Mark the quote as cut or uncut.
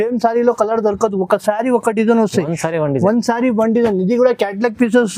uncut